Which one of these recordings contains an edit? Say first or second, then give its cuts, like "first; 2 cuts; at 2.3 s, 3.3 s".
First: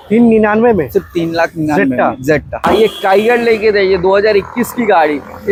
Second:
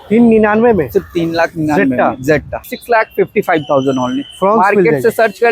second; 1 cut; at 2.6 s